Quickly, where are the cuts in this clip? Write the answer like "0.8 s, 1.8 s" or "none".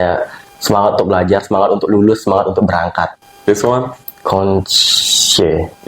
3.2 s